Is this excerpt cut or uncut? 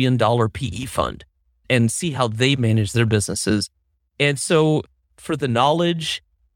uncut